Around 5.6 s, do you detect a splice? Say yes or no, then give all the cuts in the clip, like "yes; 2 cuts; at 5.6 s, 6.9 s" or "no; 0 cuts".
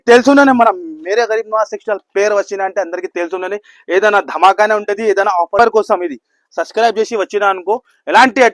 yes; 1 cut; at 5.6 s